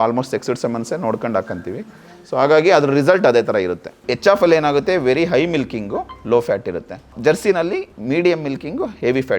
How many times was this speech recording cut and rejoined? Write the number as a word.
three